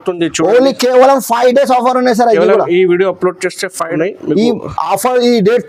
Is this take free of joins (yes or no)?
yes